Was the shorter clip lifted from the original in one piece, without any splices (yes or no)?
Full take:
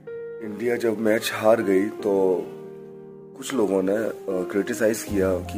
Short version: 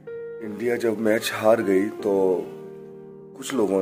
yes